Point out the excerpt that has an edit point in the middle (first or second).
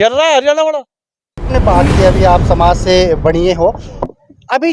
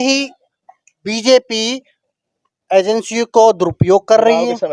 first